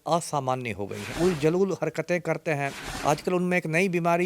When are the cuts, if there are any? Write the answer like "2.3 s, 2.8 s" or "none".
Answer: 1.1 s, 2.8 s